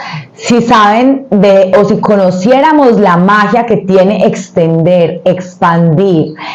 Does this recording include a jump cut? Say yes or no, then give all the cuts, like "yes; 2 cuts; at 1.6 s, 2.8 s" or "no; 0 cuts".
no; 0 cuts